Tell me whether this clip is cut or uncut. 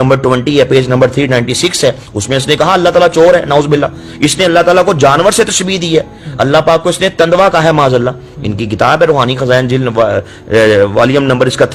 uncut